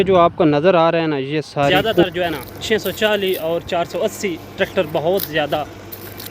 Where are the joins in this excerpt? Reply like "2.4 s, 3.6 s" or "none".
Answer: 2.0 s